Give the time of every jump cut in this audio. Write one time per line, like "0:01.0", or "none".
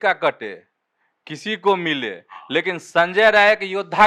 none